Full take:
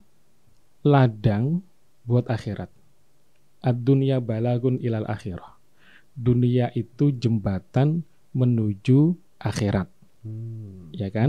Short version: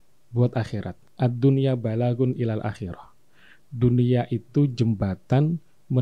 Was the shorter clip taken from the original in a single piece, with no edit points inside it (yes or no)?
no